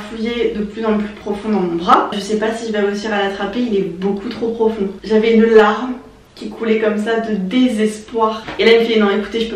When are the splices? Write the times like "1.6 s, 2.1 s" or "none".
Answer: 2.2 s, 5.0 s, 8.4 s